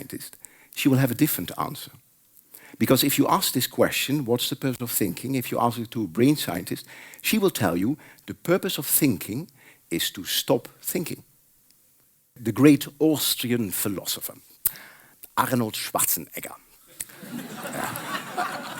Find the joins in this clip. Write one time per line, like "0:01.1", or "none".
0:12.4